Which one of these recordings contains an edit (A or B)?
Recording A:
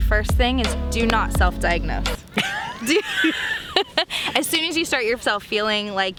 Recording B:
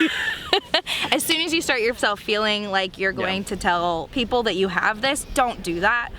B